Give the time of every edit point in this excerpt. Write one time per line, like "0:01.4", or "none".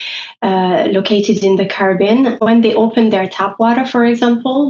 0:02.4